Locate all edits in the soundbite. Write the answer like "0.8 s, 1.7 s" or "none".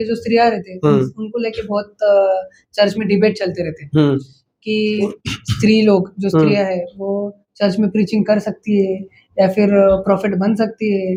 none

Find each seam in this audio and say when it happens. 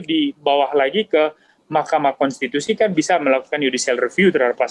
none

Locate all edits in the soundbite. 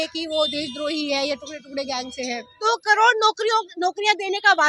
2.6 s

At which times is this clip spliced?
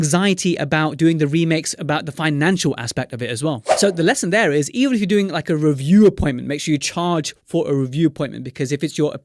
3.7 s

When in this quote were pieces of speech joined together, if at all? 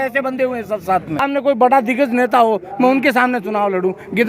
1.2 s

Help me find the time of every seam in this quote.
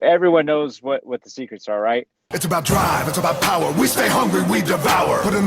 2.2 s

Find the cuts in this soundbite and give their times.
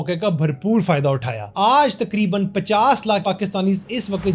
1.4 s, 3.2 s

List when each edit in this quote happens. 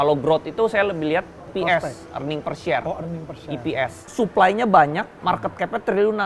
1.4 s, 4.0 s, 5.1 s

